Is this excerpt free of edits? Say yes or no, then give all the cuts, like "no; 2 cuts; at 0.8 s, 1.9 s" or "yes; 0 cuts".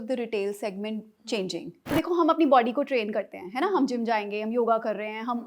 no; 1 cut; at 1.9 s